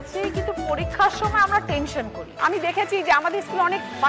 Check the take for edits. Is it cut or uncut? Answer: cut